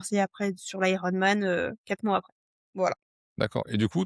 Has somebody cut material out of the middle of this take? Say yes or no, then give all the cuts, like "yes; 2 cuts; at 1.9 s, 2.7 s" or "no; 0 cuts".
no; 0 cuts